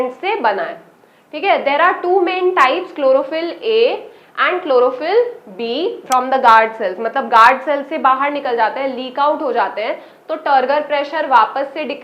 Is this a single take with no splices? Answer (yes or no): no